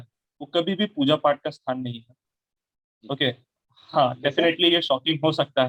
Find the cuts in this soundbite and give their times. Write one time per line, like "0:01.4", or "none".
none